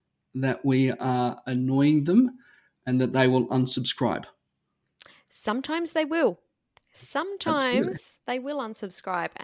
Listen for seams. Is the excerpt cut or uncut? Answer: uncut